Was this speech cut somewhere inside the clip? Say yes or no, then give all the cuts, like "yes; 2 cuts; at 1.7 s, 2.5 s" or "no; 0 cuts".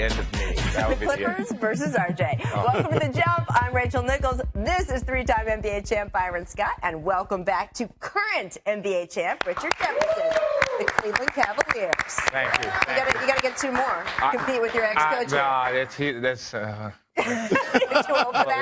no; 0 cuts